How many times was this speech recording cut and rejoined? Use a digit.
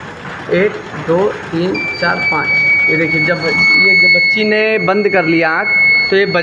0